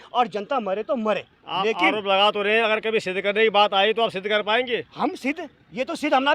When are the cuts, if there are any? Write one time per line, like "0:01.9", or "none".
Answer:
none